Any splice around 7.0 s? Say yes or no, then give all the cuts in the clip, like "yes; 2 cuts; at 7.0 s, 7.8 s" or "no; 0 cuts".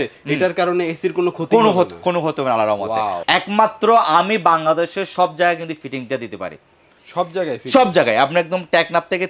no; 1 cut; at 3.2 s